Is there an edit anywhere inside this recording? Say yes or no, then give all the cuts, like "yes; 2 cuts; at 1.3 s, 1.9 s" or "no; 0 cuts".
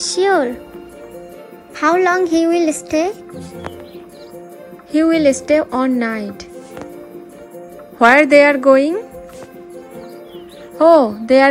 yes; 3 cuts; at 4.6 s, 7.3 s, 10.1 s